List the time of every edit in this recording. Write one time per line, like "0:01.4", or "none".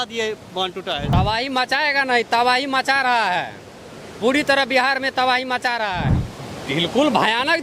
0:01.1
0:06.1